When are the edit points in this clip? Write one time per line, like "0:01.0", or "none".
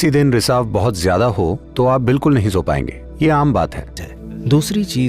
0:04.0